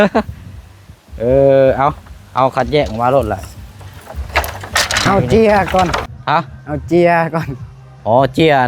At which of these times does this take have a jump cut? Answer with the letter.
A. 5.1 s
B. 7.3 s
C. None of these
A